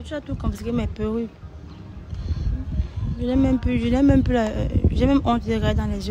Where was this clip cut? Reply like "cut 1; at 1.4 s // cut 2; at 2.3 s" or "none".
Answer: none